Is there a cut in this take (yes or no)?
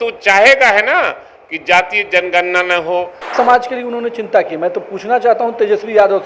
yes